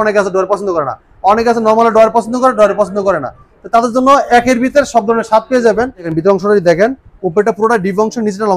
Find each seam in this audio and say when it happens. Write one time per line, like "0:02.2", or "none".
0:06.1